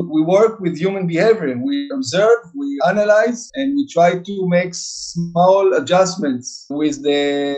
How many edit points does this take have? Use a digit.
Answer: 3